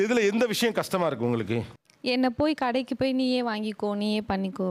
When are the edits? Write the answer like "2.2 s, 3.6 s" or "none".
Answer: none